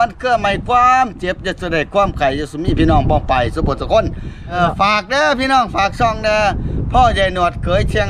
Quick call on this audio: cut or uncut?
cut